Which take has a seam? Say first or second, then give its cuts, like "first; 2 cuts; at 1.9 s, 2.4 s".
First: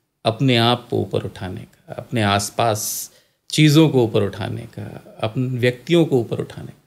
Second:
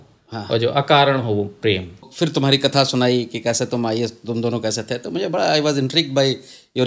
second; 1 cut; at 2.1 s